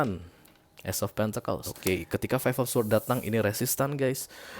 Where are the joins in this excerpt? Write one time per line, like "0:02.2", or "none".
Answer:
0:01.7